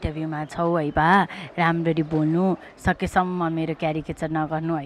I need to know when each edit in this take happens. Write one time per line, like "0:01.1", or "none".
none